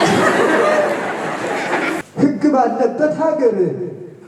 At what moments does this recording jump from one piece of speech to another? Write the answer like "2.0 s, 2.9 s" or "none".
2.0 s